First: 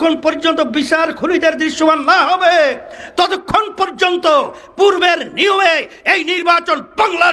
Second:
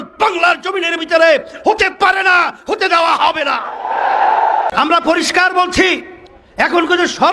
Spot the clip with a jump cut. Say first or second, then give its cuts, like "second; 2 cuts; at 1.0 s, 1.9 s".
second; 1 cut; at 4.7 s